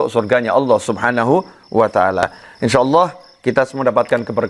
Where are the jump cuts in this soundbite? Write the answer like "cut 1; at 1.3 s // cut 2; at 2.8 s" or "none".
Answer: none